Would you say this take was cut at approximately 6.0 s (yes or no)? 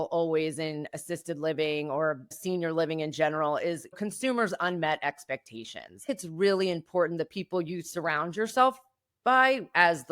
yes